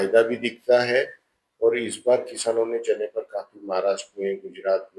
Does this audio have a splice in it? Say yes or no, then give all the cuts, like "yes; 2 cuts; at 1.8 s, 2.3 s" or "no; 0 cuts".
no; 0 cuts